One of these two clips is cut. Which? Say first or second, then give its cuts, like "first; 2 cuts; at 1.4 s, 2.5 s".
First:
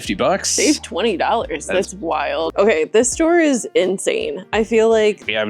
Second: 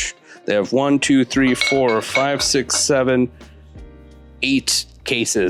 first; 1 cut; at 2.5 s